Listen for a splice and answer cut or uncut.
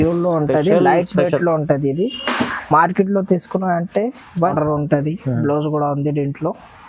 cut